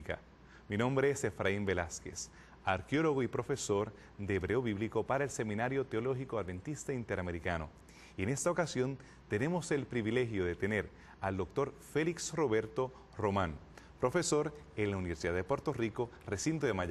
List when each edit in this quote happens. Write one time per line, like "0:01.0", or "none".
0:08.0